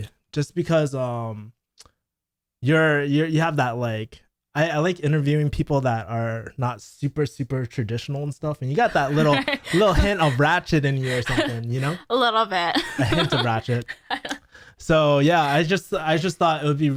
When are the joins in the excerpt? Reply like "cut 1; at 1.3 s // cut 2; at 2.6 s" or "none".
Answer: none